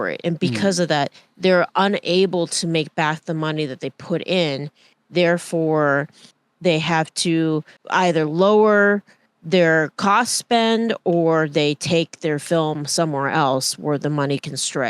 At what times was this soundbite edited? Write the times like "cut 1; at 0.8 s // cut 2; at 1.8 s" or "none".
cut 1; at 7.8 s